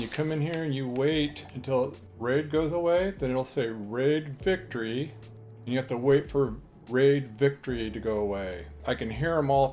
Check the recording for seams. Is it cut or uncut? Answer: cut